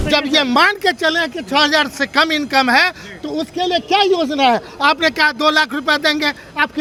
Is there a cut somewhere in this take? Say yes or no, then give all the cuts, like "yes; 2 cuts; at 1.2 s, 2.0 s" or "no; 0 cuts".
no; 0 cuts